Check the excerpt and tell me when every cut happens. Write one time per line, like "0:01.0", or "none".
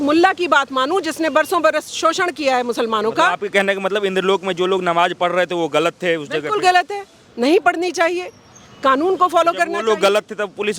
none